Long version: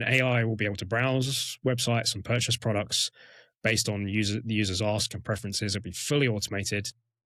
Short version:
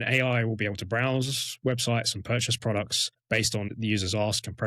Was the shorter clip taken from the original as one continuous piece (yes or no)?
no